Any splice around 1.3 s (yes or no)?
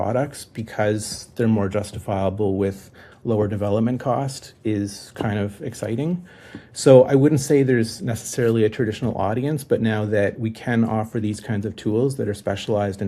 no